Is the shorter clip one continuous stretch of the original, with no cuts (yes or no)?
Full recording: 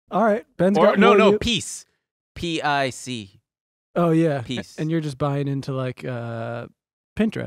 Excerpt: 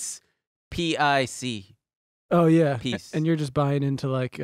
yes